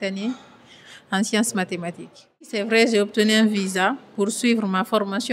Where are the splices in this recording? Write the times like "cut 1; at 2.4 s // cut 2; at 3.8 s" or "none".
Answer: cut 1; at 2.6 s